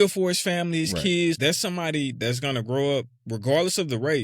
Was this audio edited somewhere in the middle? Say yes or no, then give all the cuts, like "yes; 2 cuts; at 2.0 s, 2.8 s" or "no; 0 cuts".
yes; 1 cut; at 1.4 s